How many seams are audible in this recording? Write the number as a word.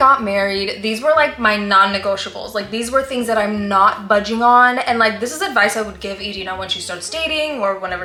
zero